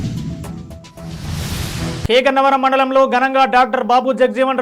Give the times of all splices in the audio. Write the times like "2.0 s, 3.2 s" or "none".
2.1 s